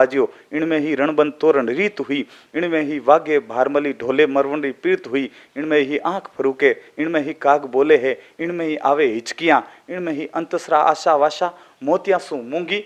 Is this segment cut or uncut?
uncut